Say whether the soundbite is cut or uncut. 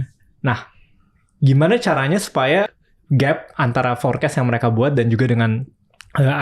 cut